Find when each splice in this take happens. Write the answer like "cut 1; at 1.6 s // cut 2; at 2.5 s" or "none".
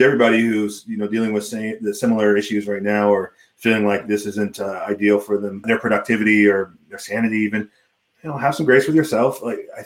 cut 1; at 5.6 s